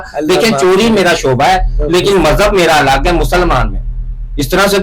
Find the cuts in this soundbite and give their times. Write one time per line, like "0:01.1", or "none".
none